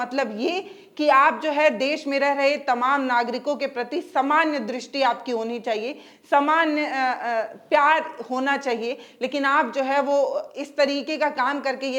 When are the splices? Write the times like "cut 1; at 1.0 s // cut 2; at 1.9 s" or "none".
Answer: none